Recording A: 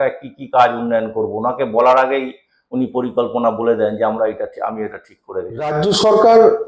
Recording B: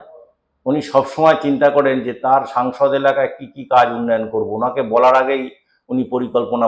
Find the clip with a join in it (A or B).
A